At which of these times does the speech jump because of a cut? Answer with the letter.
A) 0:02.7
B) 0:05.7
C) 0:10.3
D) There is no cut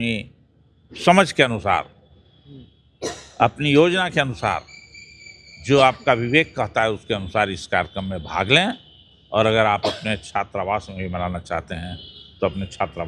D